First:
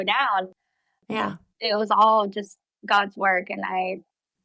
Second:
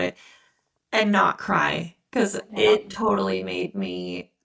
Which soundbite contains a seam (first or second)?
first